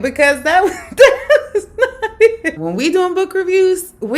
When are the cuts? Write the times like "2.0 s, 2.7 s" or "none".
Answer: 2.6 s